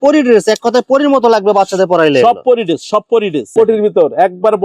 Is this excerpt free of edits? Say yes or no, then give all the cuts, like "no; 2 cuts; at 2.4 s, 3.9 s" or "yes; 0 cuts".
no; 1 cut; at 3.5 s